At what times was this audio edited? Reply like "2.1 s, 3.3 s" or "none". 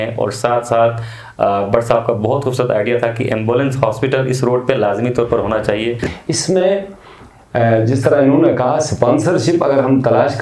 6.1 s